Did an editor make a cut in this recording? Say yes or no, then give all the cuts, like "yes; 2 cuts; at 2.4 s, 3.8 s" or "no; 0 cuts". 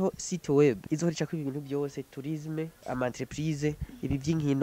yes; 2 cuts; at 0.8 s, 2.8 s